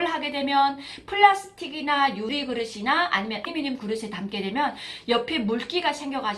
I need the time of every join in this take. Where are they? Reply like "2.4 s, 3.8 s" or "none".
2.3 s, 3.5 s